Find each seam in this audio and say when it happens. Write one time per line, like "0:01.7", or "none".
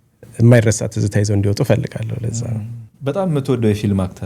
0:02.8